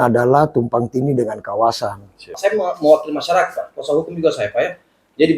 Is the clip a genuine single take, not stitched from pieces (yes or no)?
no